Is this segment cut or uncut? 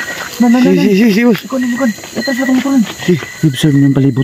cut